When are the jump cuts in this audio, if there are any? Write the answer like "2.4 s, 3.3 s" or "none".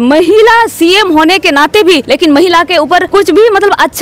2.0 s, 3.1 s